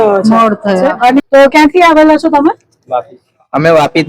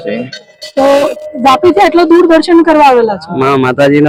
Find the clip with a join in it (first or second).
first